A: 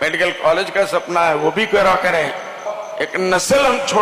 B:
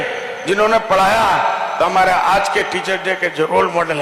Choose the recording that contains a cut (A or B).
A